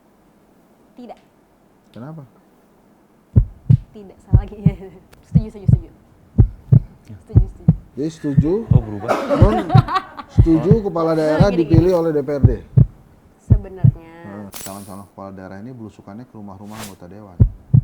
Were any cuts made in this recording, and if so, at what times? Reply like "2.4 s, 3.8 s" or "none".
14.6 s